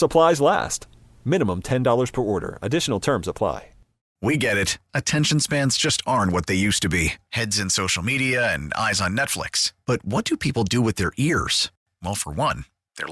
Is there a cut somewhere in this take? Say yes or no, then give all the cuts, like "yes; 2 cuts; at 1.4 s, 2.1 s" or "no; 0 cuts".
yes; 1 cut; at 4.0 s